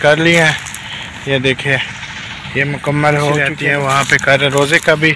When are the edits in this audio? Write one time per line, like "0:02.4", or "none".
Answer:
0:04.0